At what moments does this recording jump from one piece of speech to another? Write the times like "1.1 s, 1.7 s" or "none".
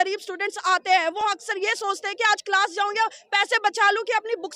none